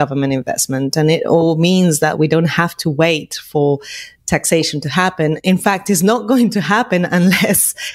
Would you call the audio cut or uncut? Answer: uncut